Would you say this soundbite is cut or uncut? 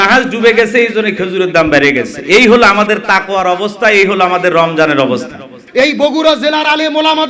cut